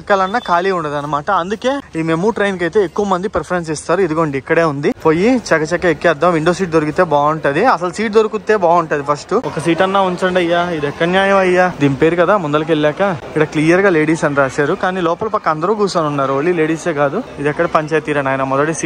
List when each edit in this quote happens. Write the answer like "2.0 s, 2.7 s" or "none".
1.9 s, 5.0 s, 9.5 s, 11.7 s, 13.2 s, 17.3 s